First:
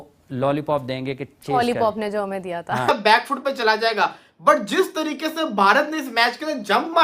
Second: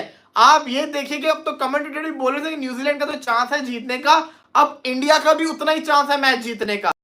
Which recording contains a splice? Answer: first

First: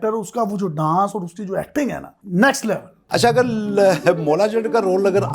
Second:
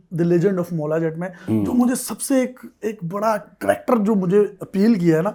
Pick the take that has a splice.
first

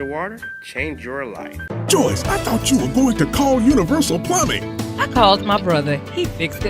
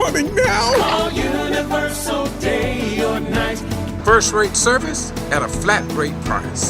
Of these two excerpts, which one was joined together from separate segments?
first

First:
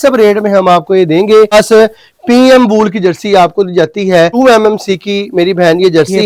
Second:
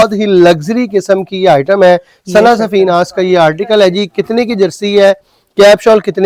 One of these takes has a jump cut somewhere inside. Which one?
first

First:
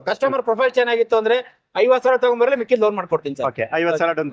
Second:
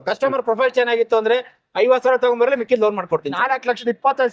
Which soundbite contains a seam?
second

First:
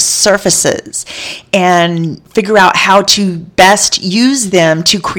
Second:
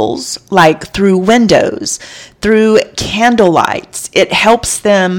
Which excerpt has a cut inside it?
first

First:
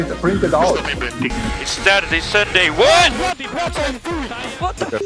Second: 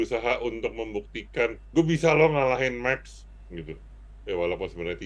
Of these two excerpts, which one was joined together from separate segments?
second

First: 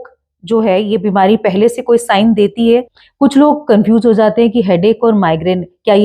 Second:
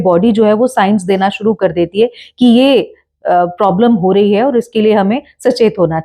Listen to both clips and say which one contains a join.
first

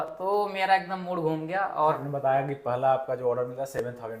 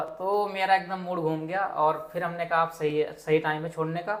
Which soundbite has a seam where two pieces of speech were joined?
first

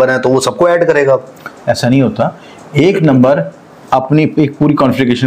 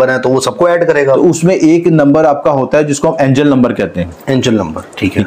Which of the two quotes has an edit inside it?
second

